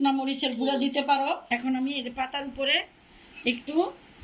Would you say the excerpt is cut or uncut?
cut